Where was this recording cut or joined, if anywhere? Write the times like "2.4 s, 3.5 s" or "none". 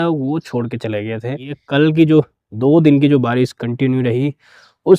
1.6 s